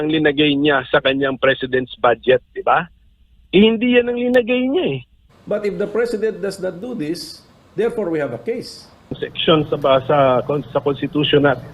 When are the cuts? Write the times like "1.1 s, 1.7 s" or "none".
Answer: 5.1 s, 9.3 s

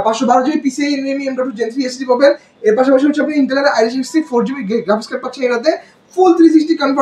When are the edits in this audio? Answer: none

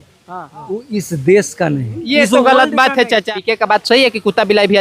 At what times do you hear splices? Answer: 3.3 s

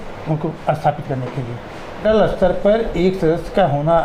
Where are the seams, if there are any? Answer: 2.0 s

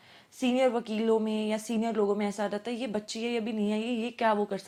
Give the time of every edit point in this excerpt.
none

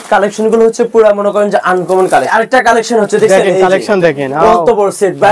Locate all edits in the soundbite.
2.3 s

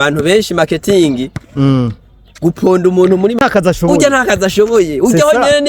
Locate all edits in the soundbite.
3.4 s

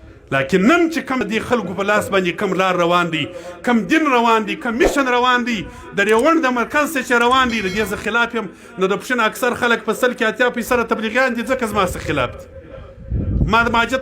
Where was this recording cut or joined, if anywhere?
1.2 s

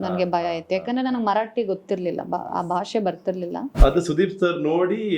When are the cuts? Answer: 3.7 s

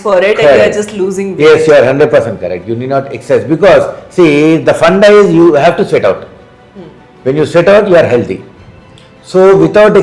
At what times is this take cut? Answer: none

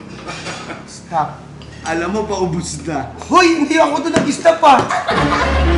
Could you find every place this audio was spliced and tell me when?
none

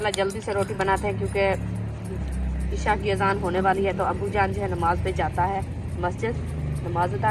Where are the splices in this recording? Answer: none

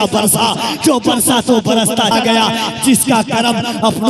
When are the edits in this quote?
2.1 s

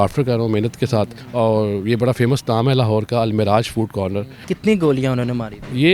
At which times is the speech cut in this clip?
1.2 s, 4.4 s

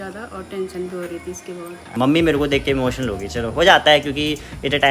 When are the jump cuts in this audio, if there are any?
1.9 s

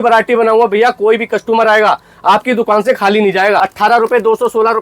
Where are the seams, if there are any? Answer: 3.6 s

